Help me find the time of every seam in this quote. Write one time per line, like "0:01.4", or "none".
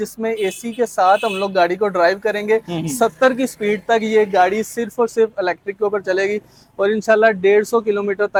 none